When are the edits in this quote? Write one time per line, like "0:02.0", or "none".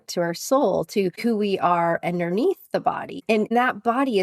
0:01.2
0:03.2